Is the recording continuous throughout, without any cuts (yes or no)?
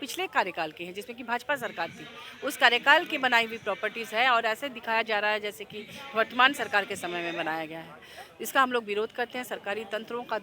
yes